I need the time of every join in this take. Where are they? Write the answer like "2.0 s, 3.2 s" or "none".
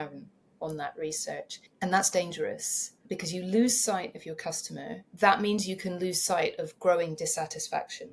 1.6 s, 5.0 s